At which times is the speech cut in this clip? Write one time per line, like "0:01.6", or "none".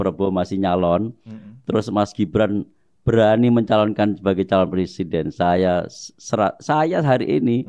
none